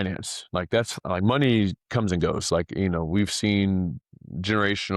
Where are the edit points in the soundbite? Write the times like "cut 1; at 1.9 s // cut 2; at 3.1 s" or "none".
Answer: none